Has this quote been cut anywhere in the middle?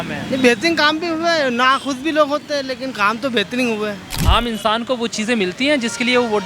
yes; 1 cut; at 4.1 s

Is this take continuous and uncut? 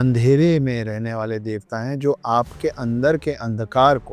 yes; 0 cuts

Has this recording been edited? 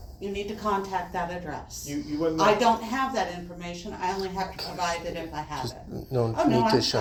no; 0 cuts

